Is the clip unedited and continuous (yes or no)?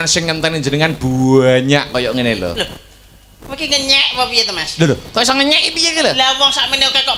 yes